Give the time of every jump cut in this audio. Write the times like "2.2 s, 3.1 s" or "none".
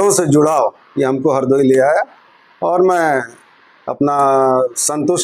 none

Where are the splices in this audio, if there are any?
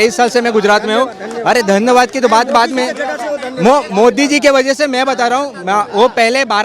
none

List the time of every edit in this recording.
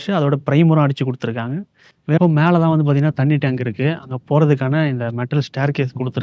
2.2 s

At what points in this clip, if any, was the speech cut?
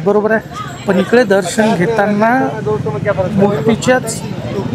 none

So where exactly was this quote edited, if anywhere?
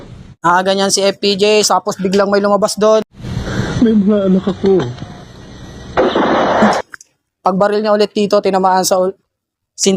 none

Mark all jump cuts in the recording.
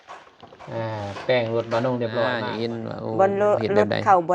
2.4 s

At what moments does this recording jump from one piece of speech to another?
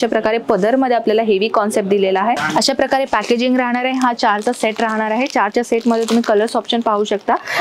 2.4 s

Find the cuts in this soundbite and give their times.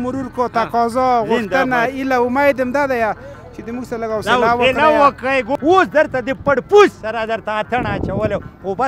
5.5 s

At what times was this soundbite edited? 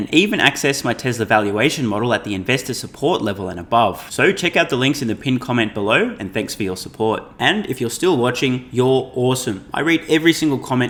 none

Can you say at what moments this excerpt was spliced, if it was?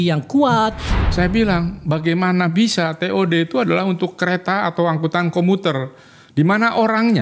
0.9 s

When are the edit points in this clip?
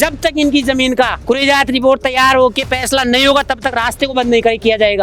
1.2 s

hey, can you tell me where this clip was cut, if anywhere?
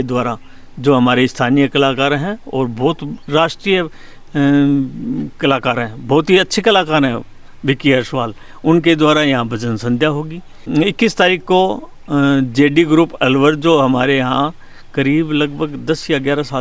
none

